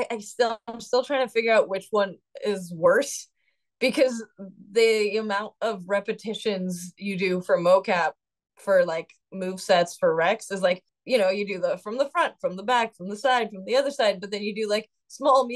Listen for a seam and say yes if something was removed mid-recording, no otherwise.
yes